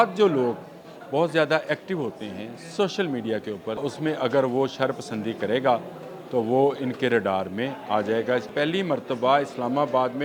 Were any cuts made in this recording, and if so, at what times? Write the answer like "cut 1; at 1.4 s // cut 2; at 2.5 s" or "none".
cut 1; at 3.8 s // cut 2; at 8.5 s